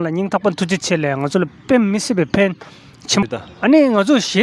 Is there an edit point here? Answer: yes; 1 cut; at 3.2 s

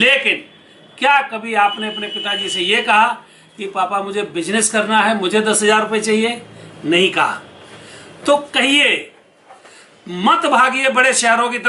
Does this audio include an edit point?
no; 0 cuts

